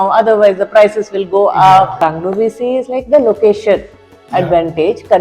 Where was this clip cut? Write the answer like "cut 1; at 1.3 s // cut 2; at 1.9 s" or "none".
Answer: cut 1; at 1.9 s